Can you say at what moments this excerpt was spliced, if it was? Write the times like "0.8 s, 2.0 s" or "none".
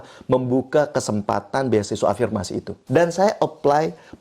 2.8 s